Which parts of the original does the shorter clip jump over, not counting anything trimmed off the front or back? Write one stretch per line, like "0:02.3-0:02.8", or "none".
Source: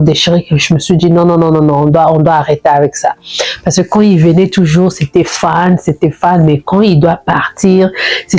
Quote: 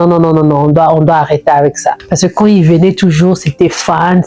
0:03.2-0:03.6